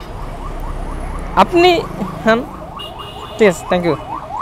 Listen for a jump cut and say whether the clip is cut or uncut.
uncut